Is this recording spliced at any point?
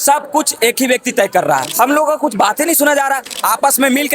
yes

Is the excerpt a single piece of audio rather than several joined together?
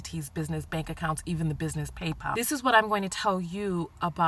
no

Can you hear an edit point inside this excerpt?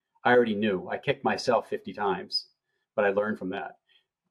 no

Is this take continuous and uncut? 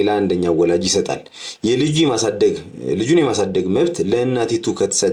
yes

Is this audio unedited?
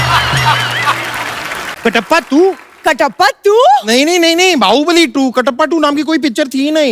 no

